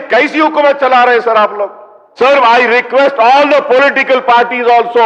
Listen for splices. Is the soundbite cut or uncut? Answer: cut